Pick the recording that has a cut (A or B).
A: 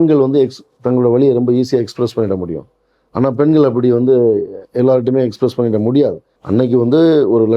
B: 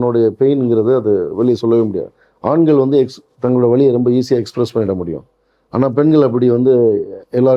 A